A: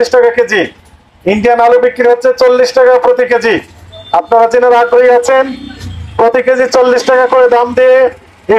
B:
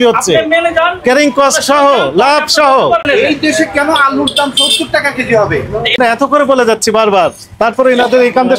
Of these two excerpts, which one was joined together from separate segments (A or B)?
B